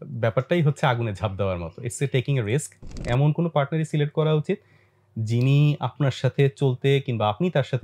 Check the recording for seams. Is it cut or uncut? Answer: cut